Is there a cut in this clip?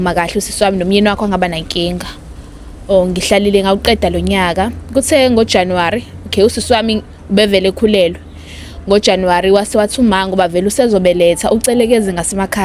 no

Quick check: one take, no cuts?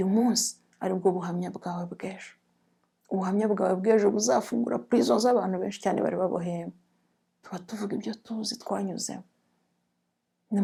yes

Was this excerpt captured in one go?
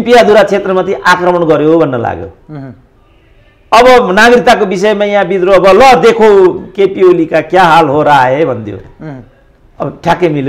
yes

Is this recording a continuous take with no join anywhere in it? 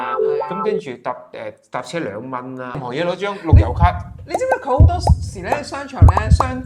no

